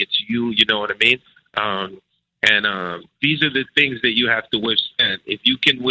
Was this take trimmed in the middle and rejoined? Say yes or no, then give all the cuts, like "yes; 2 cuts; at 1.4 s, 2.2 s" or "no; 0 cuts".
no; 0 cuts